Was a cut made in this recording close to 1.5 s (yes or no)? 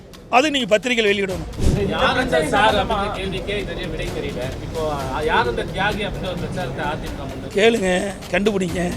yes